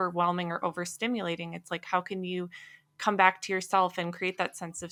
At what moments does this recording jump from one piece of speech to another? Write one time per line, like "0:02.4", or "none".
none